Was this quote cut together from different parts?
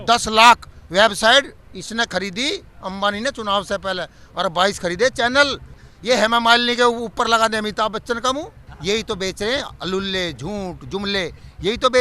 yes; 2 cuts; at 5.8 s, 8.7 s

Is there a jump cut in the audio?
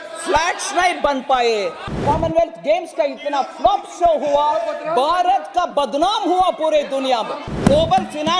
yes; 2 cuts; at 2.0 s, 7.5 s

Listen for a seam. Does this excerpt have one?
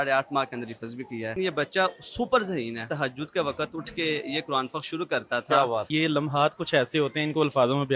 yes; 3 cuts; at 1.3 s, 2.9 s, 5.9 s

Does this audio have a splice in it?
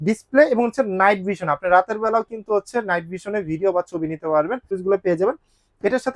yes; 1 cut; at 4.7 s

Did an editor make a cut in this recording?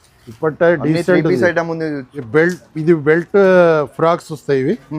yes; 1 cut; at 2.1 s

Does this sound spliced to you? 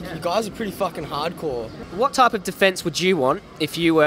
yes; 1 cut; at 1.8 s

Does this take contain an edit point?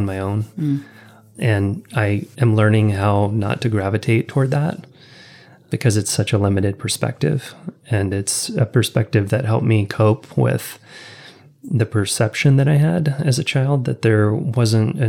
no; 0 cuts

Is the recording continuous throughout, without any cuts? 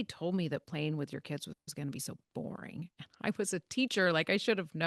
yes; 0 cuts

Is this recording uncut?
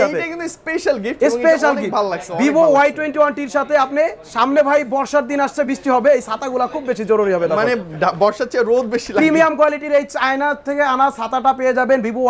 yes; 0 cuts

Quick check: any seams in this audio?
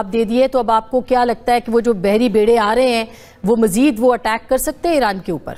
no; 0 cuts

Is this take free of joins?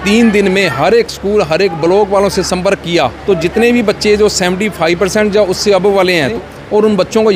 no; 2 cuts; at 3.2 s, 6.4 s

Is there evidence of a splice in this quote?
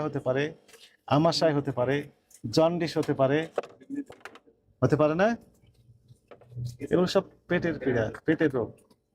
no; 0 cuts

